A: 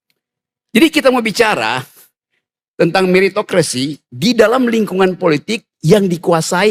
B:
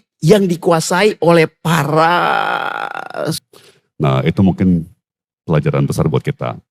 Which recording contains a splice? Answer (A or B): B